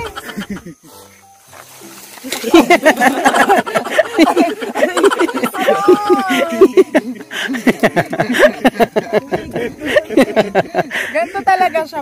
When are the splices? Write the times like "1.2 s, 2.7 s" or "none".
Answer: none